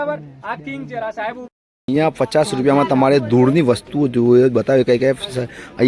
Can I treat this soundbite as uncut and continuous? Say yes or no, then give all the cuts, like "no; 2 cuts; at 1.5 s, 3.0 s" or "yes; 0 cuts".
no; 1 cut; at 1.5 s